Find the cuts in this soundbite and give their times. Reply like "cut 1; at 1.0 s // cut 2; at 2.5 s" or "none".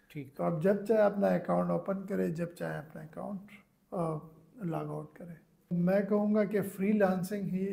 cut 1; at 5.7 s